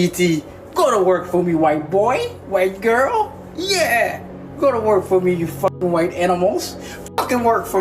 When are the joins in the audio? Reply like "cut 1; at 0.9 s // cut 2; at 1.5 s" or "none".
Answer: none